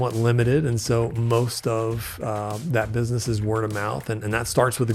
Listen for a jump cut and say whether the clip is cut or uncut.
uncut